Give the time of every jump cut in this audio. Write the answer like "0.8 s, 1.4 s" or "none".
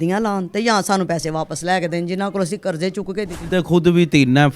3.5 s